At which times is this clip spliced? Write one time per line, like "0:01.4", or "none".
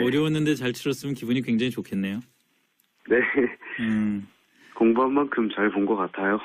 none